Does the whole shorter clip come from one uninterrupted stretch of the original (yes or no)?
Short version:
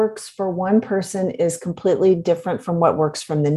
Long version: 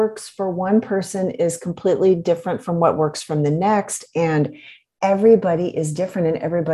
yes